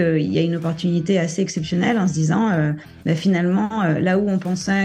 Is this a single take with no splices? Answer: yes; 0 cuts

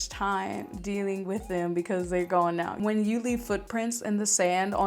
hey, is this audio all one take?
no; 1 cut; at 2.8 s

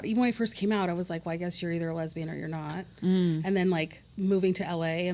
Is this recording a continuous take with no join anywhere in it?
no; 1 cut; at 4.0 s

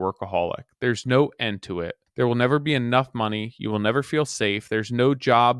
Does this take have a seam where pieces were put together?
yes; 1 cut; at 2.0 s

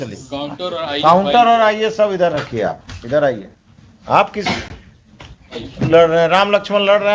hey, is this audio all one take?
yes; 0 cuts

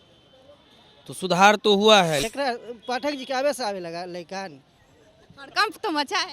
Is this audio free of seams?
no; 1 cut; at 2.2 s

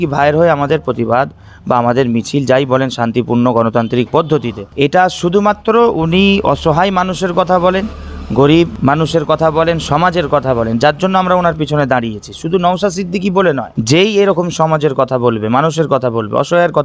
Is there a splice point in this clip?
no; 0 cuts

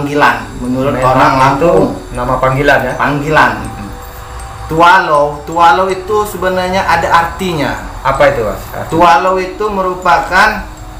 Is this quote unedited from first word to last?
yes; 0 cuts

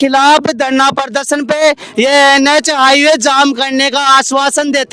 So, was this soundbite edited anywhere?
no; 0 cuts

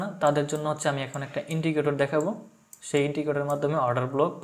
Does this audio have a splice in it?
no; 0 cuts

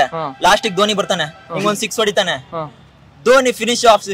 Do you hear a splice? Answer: no; 0 cuts

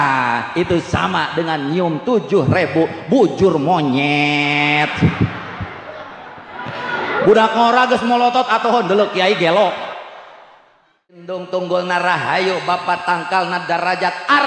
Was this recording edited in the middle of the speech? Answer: yes; 1 cut; at 11.3 s

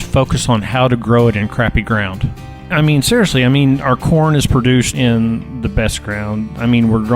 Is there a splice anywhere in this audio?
yes; 2 cuts; at 2.6 s, 4.9 s

